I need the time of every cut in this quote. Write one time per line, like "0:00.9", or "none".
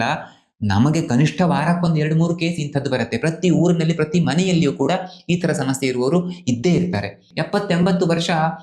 0:07.3